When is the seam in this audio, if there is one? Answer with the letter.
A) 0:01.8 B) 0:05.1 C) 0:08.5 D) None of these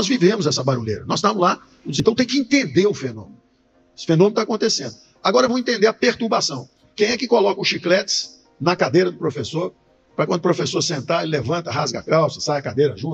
A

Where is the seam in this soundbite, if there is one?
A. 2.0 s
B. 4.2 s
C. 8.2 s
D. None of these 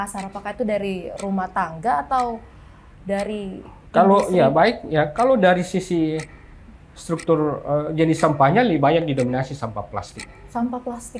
D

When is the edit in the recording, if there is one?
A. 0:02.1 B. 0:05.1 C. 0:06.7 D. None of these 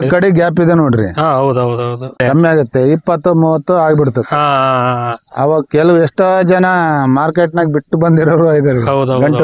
A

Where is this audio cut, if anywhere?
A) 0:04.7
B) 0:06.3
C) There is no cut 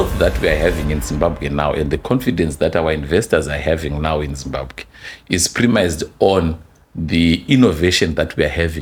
C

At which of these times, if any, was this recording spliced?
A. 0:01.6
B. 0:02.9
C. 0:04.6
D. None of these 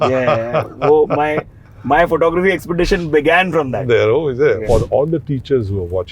C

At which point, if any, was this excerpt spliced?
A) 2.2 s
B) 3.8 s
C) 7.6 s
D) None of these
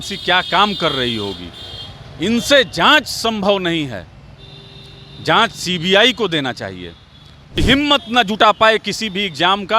C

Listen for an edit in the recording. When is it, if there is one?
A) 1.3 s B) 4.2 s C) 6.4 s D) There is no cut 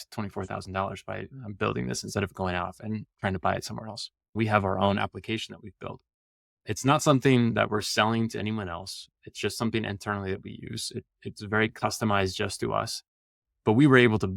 B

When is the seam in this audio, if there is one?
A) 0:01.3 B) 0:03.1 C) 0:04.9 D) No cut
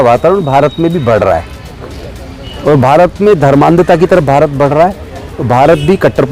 D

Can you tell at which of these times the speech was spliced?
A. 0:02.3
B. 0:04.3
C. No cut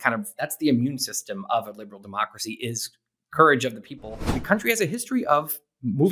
B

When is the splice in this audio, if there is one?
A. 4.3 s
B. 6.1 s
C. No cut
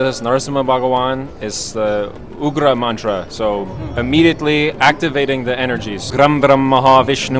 B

